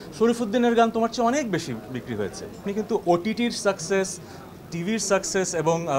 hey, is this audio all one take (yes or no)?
no